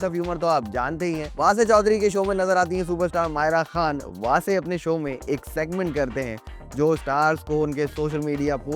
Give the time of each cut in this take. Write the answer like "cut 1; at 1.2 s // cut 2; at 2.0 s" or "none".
cut 1; at 1.3 s